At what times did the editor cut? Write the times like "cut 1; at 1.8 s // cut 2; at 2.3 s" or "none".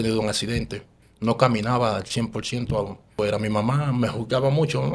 cut 1; at 3.1 s

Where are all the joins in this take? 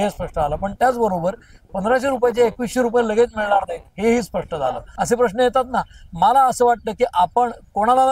cut 1; at 4.9 s

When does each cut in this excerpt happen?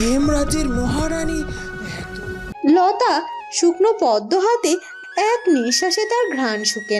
cut 1; at 2.4 s

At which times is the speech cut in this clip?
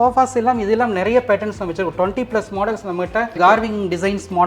cut 1; at 3.4 s

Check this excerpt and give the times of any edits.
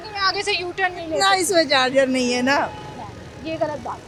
none

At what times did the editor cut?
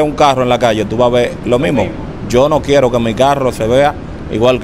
none

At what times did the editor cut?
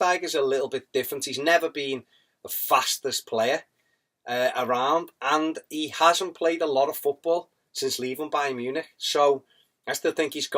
cut 1; at 2.9 s

